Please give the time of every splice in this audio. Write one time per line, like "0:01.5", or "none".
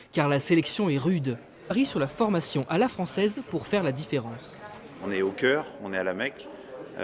none